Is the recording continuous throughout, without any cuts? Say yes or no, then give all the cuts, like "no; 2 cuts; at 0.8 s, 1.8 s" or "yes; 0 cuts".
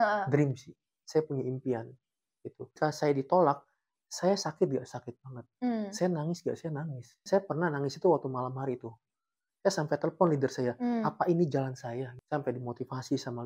no; 4 cuts; at 0.9 s, 2.8 s, 7.2 s, 12.1 s